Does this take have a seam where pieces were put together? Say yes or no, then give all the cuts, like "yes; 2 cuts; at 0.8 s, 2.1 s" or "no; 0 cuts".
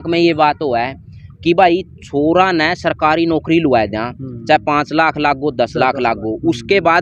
no; 0 cuts